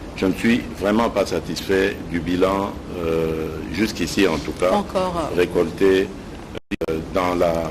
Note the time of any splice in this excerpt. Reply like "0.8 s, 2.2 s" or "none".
none